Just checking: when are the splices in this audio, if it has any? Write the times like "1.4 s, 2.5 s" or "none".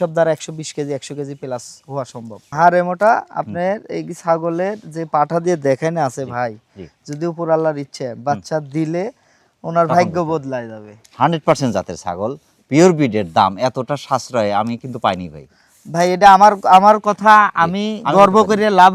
2.4 s, 10.9 s